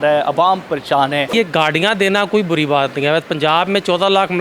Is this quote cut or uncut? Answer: cut